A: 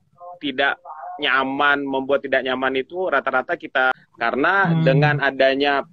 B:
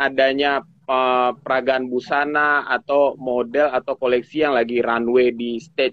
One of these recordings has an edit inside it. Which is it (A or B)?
A